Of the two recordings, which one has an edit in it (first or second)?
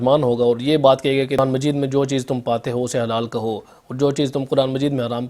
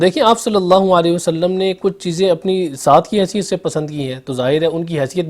first